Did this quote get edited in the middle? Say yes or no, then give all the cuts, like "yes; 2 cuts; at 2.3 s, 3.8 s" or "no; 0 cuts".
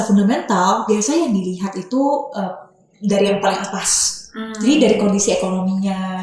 no; 0 cuts